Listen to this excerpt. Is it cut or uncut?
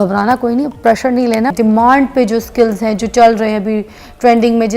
cut